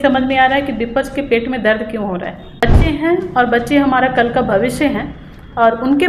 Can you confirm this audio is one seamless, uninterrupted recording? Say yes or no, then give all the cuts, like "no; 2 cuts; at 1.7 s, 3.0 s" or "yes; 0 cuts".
no; 1 cut; at 2.6 s